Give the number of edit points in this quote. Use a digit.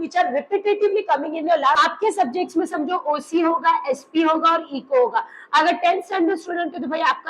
1